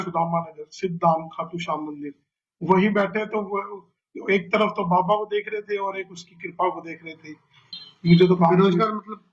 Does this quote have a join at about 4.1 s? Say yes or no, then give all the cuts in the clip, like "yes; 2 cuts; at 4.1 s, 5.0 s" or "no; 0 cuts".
no; 1 cut; at 7.7 s